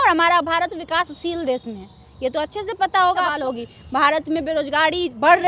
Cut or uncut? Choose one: cut